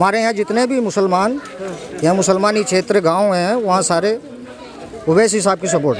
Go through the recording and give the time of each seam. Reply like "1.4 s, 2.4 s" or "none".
none